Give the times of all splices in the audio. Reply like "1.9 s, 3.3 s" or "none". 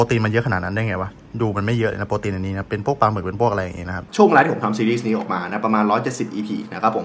4.0 s